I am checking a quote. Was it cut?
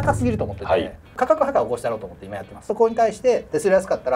yes; 2 cuts; at 1.1 s, 2.7 s

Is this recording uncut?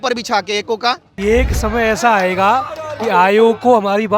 no; 1 cut; at 1.1 s

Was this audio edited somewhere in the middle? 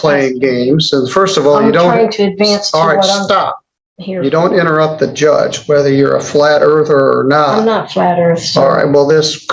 no; 0 cuts

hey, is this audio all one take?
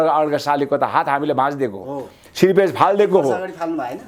yes; 0 cuts

